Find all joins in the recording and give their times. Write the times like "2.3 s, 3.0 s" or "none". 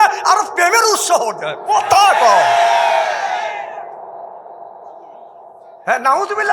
none